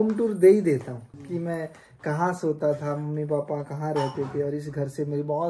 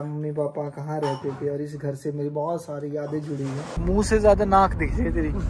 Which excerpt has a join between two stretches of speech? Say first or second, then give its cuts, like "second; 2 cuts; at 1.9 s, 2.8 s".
second; 1 cut; at 3.7 s